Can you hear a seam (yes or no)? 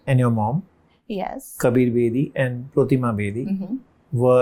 no